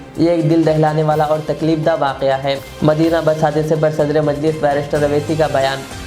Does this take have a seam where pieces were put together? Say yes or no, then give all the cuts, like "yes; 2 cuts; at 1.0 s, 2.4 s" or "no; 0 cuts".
no; 0 cuts